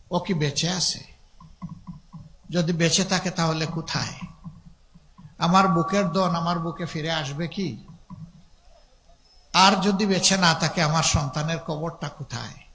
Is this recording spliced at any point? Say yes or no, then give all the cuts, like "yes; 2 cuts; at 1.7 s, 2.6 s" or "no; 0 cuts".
no; 0 cuts